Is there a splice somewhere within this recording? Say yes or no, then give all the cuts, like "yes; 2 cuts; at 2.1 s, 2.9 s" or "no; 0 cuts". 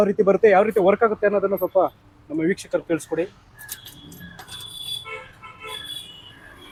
no; 0 cuts